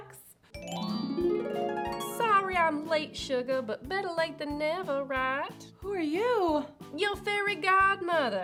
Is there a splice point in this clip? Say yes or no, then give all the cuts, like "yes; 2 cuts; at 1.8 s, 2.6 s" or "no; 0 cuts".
no; 0 cuts